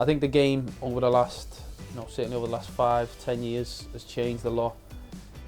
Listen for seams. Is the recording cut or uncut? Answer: uncut